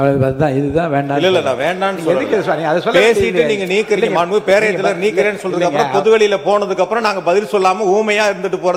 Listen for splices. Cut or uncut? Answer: uncut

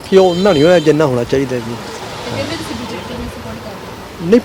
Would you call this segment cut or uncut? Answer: uncut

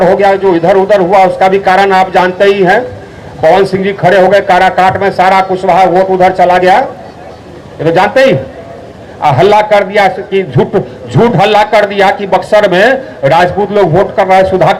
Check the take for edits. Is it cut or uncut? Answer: uncut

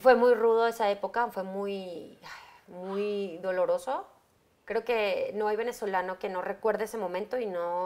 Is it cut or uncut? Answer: uncut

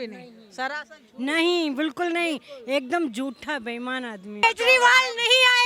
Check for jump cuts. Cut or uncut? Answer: cut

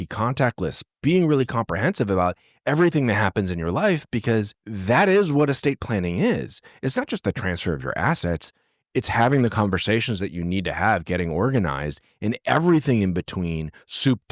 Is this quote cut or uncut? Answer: uncut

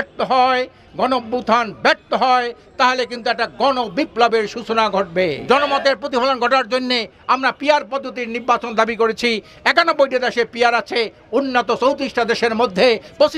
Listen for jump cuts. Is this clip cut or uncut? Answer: cut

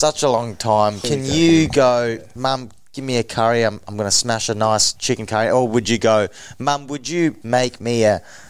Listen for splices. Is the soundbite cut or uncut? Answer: cut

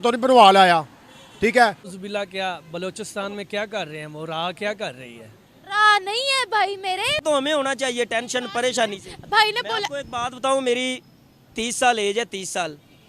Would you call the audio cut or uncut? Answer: cut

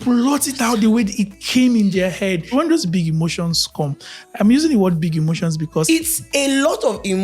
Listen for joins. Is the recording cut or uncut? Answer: cut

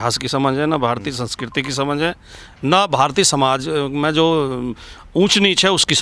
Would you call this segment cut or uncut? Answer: uncut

